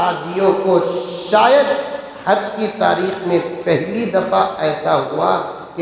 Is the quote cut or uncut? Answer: uncut